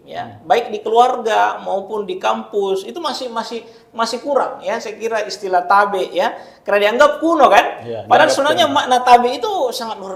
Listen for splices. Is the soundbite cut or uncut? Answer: uncut